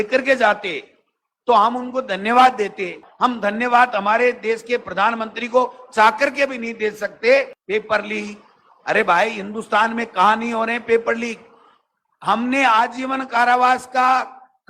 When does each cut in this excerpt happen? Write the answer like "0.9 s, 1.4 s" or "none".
3.0 s, 7.6 s